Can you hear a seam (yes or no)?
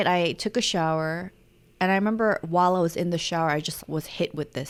no